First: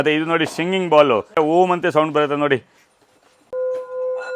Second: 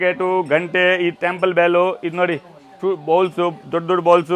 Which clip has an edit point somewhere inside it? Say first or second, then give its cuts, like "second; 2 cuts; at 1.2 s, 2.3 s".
first; 2 cuts; at 1.3 s, 3.5 s